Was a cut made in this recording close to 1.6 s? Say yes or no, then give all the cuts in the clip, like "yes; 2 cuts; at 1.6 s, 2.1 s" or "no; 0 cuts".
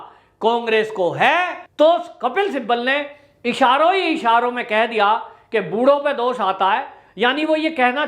yes; 1 cut; at 1.6 s